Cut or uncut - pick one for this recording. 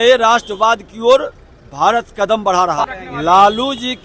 cut